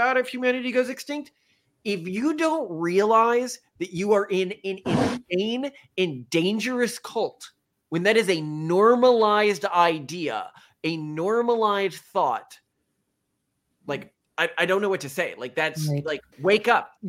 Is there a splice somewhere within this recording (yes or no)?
no